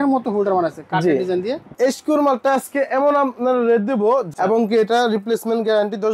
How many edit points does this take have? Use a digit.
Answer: 2